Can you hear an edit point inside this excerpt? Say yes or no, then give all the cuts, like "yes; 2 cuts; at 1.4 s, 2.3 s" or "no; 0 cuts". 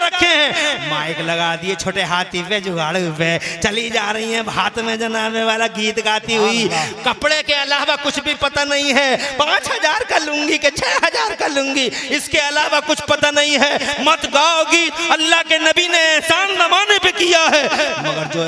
no; 0 cuts